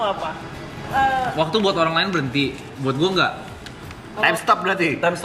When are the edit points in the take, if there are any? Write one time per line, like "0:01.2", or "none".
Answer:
0:01.1